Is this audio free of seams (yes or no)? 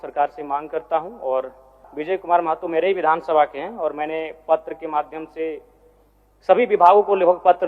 no